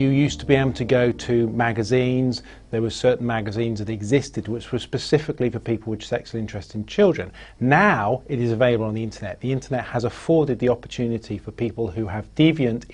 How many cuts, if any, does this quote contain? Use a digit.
0